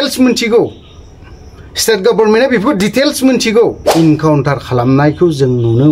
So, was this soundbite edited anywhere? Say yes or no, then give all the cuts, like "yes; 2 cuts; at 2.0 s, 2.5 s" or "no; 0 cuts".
yes; 1 cut; at 3.8 s